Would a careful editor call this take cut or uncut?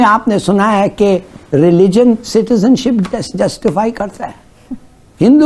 uncut